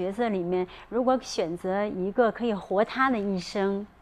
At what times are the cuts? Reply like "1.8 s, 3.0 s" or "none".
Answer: none